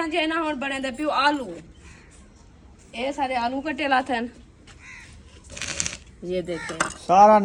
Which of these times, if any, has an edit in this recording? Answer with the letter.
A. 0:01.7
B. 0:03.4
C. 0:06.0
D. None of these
D